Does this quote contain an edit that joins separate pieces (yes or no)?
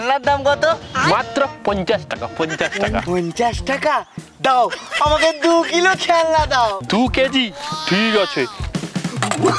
no